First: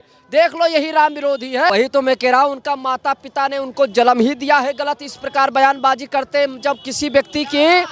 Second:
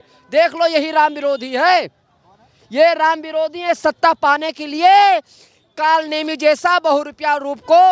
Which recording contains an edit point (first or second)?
first